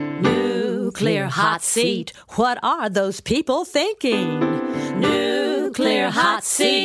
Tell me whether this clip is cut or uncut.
uncut